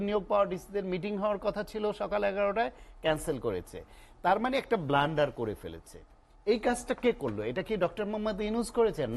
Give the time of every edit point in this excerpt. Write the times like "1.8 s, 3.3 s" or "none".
none